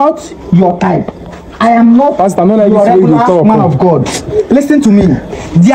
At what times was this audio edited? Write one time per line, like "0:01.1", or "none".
none